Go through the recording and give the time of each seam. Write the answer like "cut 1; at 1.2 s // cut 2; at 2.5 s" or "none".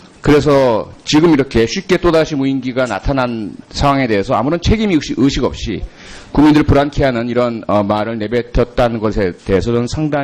cut 1; at 8.0 s